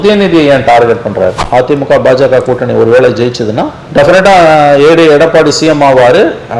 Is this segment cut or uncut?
cut